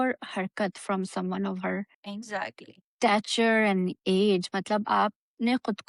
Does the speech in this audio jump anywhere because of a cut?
no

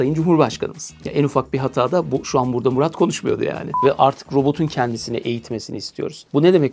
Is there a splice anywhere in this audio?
yes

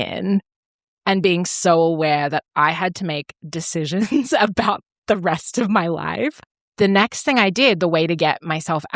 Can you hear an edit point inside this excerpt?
yes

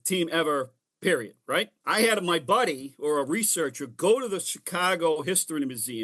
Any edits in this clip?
yes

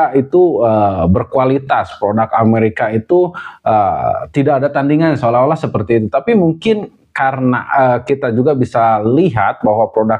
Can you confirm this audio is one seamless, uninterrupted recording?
yes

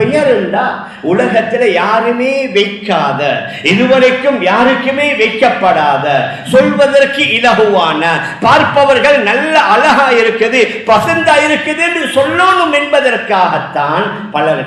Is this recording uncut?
yes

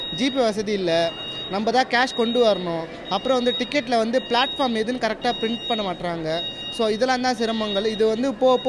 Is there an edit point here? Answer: no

